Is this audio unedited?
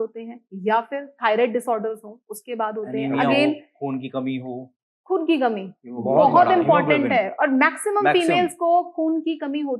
yes; 0 cuts

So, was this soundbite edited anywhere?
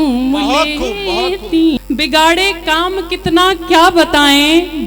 yes; 1 cut; at 1.8 s

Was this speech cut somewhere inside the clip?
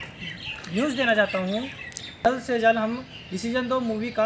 yes; 1 cut; at 2.2 s

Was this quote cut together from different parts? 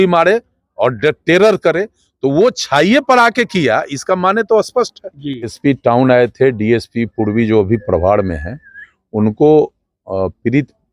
yes; 1 cut; at 5.5 s

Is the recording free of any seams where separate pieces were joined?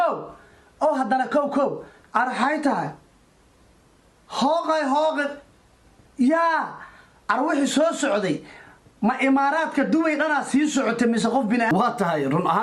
yes; 0 cuts

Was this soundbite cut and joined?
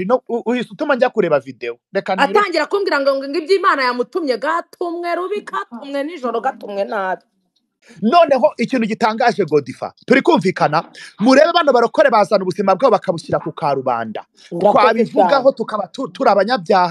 no; 0 cuts

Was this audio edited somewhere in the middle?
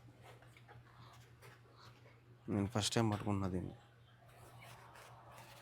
no; 0 cuts

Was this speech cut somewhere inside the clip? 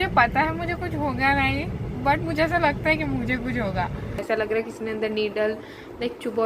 yes; 1 cut; at 4.2 s

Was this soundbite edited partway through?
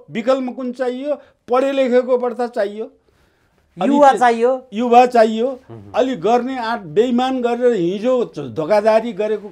no; 0 cuts

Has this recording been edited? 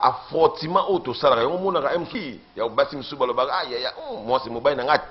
yes; 1 cut; at 2.1 s

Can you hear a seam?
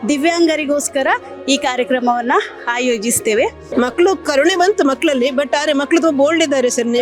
yes; 1 cut; at 3.6 s

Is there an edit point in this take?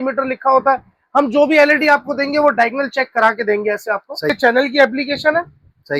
yes; 1 cut; at 4.3 s

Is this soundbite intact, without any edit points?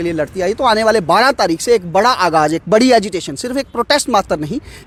yes; 0 cuts

